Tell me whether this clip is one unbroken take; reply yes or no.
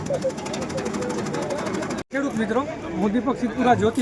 no